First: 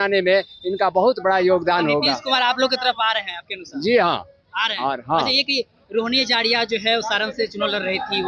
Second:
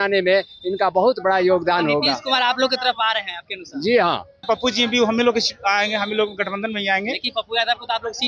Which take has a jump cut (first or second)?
second